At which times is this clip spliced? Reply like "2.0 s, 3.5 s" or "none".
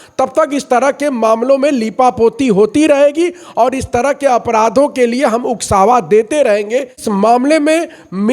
7.0 s